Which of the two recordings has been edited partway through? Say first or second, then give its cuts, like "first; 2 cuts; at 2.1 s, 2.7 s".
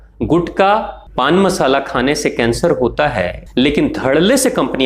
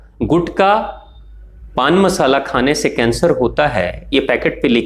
first; 2 cuts; at 1.0 s, 3.4 s